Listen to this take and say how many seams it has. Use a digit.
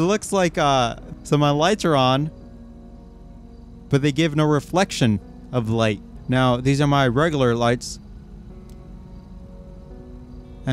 1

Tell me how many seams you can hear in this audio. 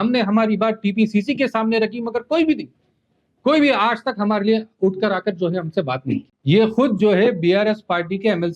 1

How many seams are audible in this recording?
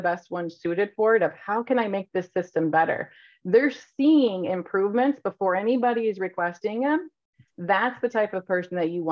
0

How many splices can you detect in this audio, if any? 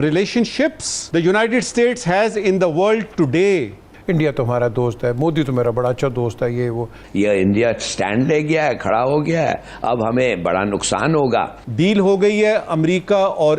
4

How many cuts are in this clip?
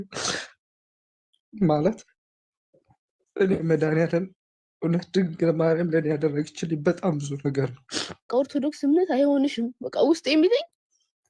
1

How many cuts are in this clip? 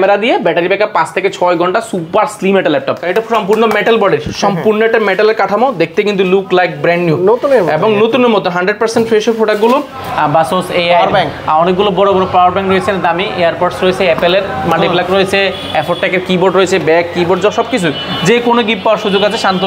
2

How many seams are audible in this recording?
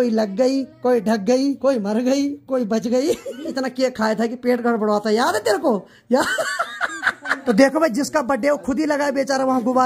3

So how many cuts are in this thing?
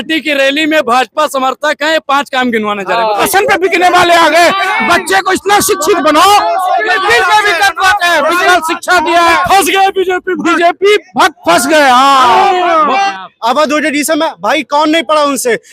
3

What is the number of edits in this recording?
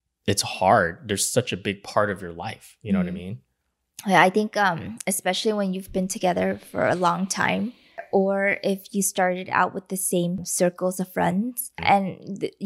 3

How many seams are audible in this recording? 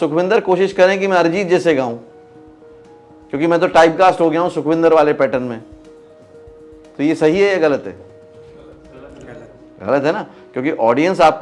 0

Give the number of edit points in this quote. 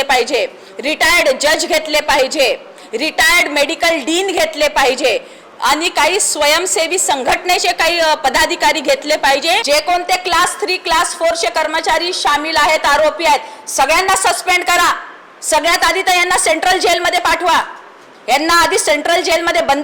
1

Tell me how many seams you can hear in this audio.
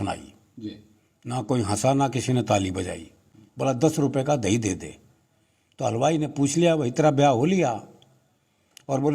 1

